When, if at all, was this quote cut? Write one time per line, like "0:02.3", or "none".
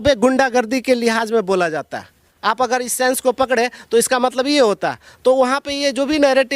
0:02.2